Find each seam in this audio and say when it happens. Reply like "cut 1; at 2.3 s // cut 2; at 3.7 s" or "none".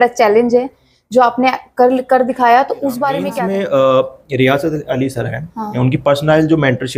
cut 1; at 3.3 s